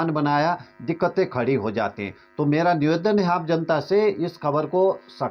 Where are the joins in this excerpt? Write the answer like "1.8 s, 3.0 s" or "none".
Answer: none

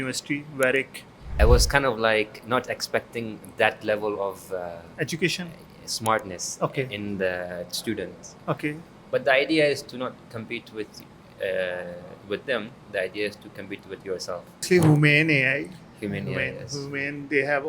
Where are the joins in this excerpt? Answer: 1.4 s, 8.9 s, 14.6 s

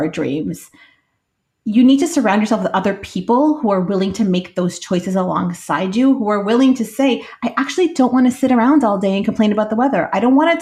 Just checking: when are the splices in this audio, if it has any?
none

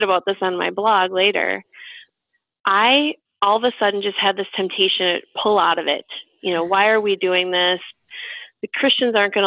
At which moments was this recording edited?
2.1 s

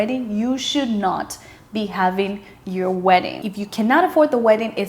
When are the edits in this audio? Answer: 3.3 s

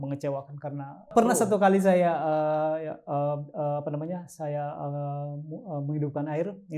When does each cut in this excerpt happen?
1.1 s

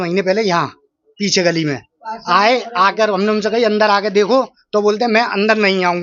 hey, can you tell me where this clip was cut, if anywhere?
none

